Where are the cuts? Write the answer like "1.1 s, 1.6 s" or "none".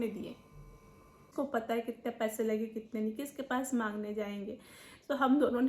1.3 s

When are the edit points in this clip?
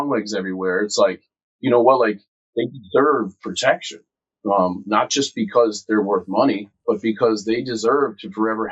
2.4 s

